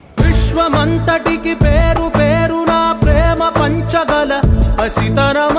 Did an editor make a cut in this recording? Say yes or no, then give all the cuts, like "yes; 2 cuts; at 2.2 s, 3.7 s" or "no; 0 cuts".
no; 0 cuts